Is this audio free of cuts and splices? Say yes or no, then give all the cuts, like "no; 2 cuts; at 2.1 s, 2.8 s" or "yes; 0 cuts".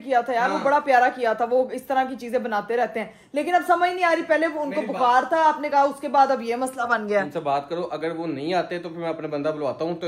yes; 0 cuts